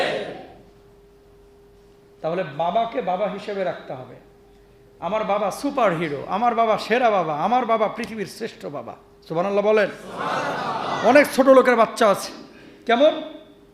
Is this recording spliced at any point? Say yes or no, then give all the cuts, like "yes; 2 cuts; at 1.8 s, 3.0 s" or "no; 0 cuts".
yes; 1 cut; at 10.9 s